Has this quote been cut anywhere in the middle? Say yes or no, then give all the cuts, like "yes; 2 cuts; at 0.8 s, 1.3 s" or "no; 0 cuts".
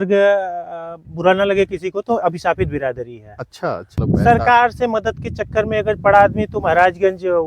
yes; 1 cut; at 4.0 s